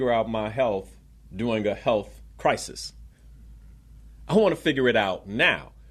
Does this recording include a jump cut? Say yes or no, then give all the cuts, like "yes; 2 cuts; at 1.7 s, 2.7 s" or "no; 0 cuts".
no; 0 cuts